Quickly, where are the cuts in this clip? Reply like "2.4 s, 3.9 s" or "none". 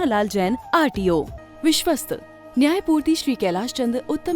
1.4 s